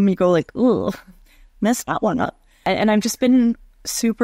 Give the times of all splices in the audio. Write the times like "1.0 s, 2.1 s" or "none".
2.6 s